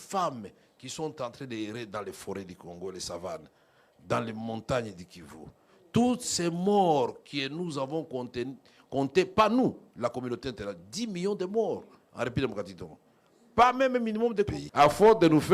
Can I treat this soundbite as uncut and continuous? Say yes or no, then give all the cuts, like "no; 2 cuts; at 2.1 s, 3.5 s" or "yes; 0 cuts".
no; 1 cut; at 14.6 s